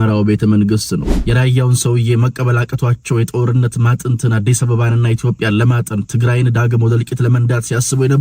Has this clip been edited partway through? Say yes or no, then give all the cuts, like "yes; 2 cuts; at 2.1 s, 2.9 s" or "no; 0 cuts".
yes; 1 cut; at 1.1 s